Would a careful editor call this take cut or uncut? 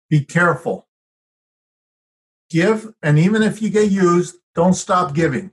uncut